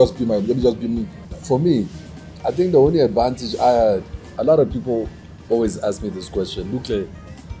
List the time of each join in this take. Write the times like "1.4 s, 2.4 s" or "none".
1.2 s, 4.3 s